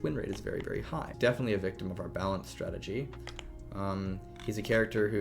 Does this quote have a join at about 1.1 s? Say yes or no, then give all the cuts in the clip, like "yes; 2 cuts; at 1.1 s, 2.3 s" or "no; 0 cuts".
yes; 1 cut; at 1.1 s